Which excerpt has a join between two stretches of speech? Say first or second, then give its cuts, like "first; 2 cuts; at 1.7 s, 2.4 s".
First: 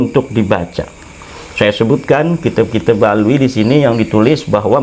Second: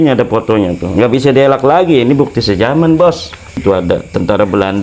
second; 1 cut; at 3.6 s